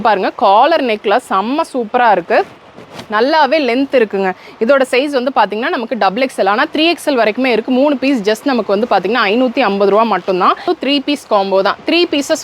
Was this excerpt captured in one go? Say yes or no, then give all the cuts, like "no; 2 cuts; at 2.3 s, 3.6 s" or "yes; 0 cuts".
no; 1 cut; at 10.6 s